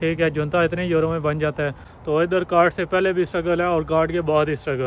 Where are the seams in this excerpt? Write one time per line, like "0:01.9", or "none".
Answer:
0:01.9